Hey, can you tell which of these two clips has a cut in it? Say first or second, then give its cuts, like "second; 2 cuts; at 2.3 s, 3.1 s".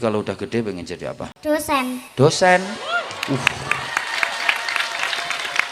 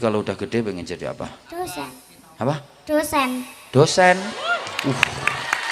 first; 2 cuts; at 1.3 s, 2.0 s